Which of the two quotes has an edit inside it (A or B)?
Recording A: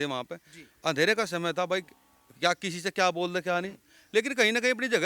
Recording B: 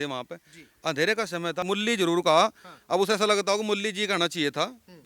B